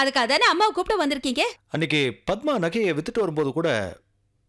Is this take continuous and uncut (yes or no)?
no